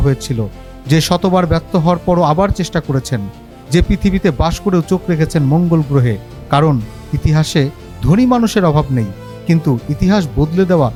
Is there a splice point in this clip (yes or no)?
no